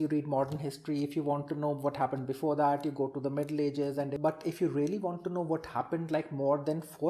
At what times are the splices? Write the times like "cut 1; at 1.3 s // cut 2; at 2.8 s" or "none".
cut 1; at 4.1 s